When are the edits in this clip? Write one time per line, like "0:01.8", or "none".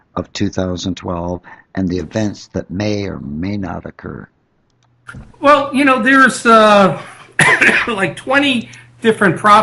0:05.8